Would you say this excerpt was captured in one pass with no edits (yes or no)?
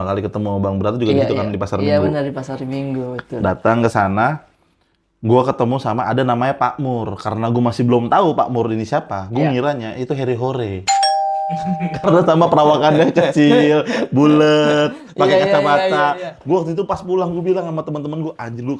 yes